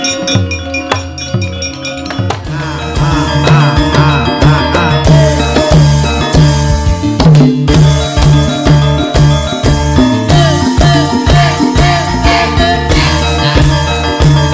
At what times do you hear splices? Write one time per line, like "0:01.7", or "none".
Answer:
0:02.8